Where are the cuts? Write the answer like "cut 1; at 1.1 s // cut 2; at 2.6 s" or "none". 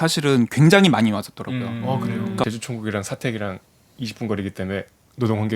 cut 1; at 2.4 s